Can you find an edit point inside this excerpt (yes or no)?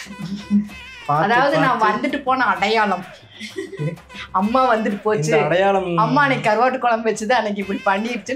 no